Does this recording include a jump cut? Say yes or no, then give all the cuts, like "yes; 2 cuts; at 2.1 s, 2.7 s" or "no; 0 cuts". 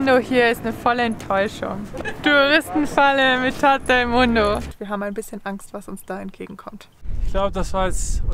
yes; 3 cuts; at 2.1 s, 4.8 s, 7.2 s